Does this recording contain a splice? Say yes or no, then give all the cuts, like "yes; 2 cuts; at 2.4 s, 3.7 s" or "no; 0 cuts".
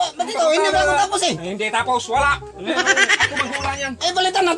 no; 0 cuts